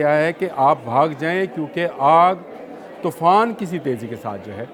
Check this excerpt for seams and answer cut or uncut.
uncut